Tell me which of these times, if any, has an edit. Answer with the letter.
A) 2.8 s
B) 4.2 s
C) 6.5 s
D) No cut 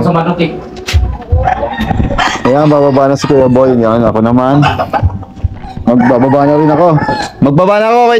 D